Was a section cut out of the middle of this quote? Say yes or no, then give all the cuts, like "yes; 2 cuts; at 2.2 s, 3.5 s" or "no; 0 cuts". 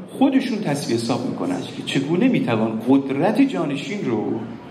yes; 1 cut; at 1.8 s